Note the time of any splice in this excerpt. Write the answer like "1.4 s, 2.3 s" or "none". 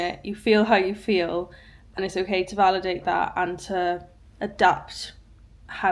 none